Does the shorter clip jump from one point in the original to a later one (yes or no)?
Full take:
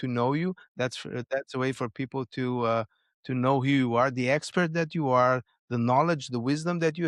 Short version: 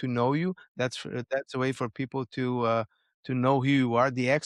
no